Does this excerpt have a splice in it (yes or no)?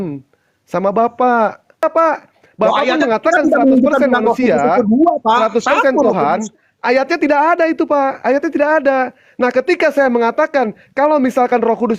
yes